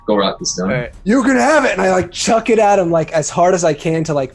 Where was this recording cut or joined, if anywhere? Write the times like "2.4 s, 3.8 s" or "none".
0.9 s